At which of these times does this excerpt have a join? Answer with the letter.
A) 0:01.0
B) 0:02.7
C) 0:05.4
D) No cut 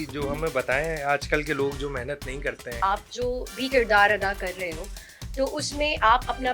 B